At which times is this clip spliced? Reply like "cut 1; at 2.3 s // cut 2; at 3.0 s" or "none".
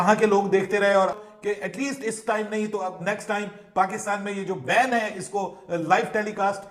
cut 1; at 1.3 s